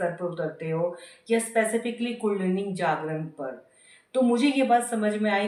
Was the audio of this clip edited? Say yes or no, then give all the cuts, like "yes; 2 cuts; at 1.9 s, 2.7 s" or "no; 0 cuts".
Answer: no; 0 cuts